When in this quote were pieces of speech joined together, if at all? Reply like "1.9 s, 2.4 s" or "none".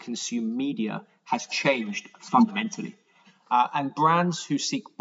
3.2 s